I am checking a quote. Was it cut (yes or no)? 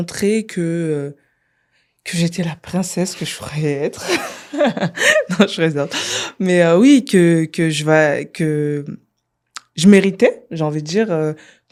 no